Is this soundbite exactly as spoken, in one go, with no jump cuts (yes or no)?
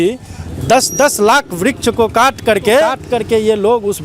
no